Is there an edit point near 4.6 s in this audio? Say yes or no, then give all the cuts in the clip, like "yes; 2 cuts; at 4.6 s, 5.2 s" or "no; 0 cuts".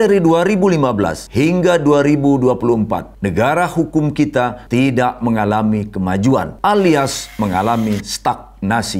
yes; 4 cuts; at 1.2 s, 3.1 s, 4.6 s, 6.5 s